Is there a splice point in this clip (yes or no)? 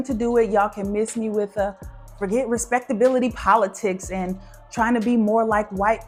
no